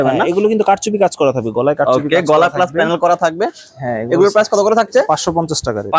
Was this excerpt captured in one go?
yes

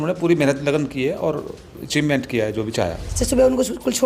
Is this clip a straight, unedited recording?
no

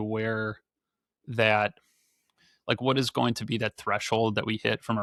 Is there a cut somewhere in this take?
no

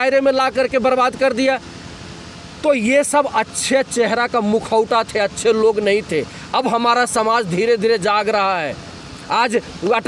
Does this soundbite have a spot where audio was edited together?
no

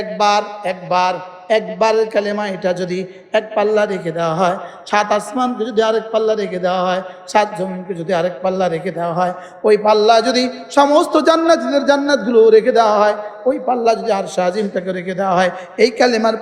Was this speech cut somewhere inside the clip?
no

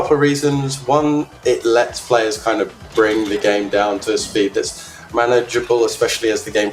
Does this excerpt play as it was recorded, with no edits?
yes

